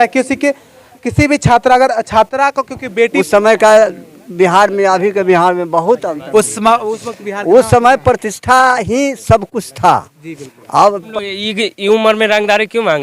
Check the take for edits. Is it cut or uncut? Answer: cut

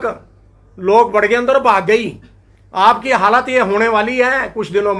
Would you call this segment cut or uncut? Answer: uncut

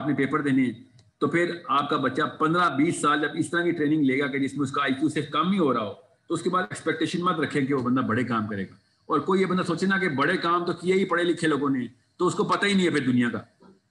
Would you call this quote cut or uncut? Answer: uncut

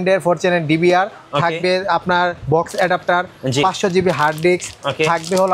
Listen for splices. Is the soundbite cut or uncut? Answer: uncut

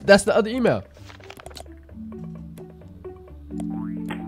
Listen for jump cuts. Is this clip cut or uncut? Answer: uncut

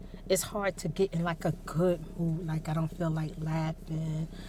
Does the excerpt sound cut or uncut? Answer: uncut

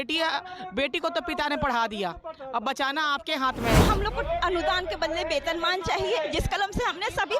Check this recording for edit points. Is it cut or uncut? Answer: cut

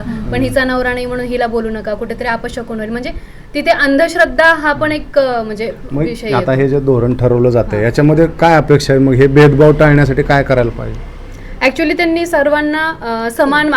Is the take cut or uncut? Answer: uncut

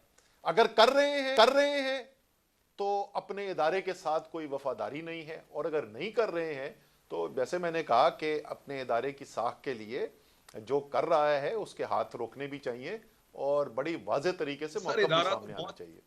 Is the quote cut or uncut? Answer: uncut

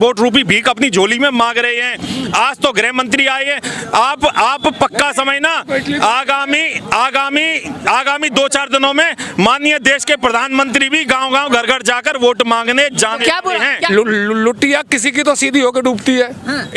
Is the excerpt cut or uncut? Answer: cut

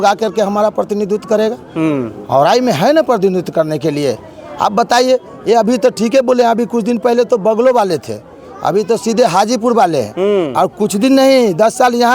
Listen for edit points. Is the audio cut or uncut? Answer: uncut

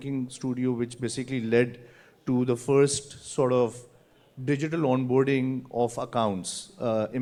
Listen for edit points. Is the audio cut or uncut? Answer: uncut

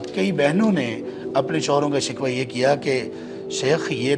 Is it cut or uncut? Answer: uncut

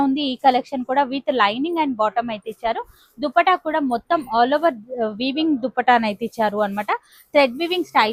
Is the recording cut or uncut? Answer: uncut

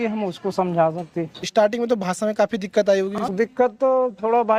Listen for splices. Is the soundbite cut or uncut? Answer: cut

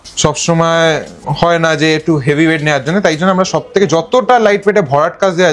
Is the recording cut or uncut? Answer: uncut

